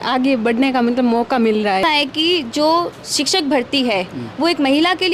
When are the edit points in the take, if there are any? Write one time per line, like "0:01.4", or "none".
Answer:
0:01.8